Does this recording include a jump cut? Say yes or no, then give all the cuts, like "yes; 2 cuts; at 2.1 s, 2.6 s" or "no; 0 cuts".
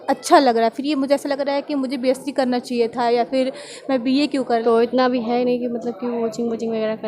yes; 1 cut; at 4.6 s